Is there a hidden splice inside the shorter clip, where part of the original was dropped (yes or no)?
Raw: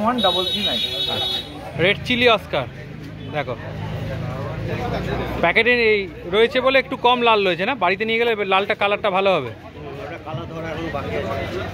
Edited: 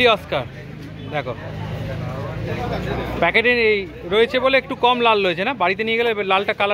no